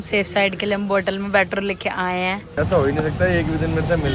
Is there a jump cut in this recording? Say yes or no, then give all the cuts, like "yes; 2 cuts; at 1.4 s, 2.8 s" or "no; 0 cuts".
yes; 1 cut; at 2.5 s